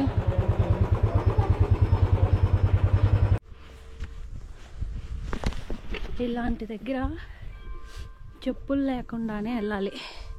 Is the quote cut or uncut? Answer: cut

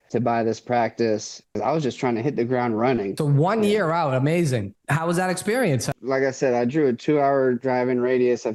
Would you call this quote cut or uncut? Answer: uncut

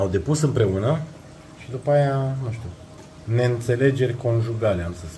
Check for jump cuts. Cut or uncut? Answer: uncut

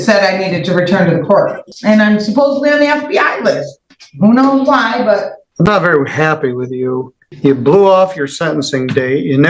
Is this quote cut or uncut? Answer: cut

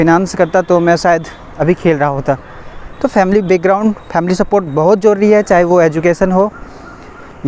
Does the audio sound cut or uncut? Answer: uncut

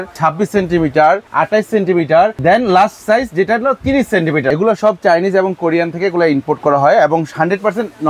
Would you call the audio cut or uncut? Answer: cut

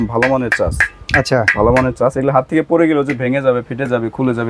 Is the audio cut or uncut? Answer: uncut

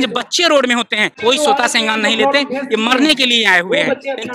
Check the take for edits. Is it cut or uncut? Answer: cut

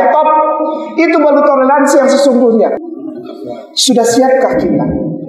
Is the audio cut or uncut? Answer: cut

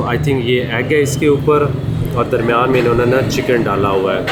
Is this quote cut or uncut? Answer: uncut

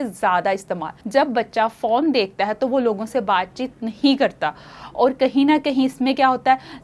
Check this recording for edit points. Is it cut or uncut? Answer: uncut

